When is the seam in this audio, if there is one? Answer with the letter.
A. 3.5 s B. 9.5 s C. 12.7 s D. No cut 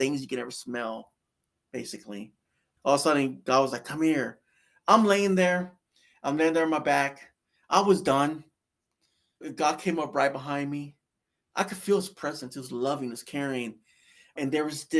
B